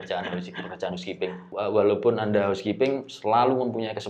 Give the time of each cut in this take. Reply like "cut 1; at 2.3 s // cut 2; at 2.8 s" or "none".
cut 1; at 1.4 s